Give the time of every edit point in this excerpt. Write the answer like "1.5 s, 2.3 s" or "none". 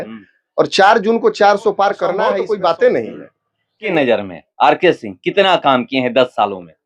3.8 s